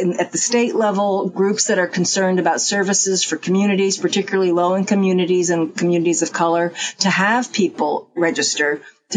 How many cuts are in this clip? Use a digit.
0